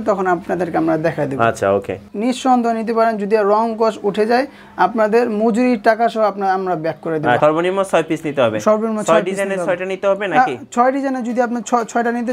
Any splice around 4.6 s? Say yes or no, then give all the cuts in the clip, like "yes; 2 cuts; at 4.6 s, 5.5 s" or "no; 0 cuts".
no; 2 cuts; at 2.1 s, 7.4 s